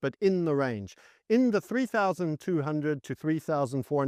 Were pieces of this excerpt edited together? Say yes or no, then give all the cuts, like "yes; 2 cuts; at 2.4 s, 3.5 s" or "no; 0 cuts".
no; 0 cuts